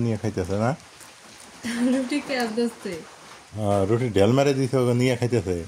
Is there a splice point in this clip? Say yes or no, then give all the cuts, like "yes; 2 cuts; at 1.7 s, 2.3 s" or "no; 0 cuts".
no; 0 cuts